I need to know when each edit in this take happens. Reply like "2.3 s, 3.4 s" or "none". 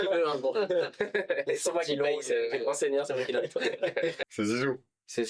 4.2 s